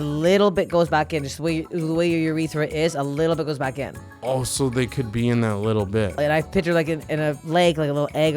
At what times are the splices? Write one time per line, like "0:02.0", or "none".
0:06.2